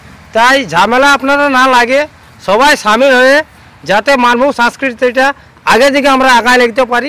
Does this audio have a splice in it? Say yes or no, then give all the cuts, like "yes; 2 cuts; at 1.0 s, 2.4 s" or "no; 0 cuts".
no; 0 cuts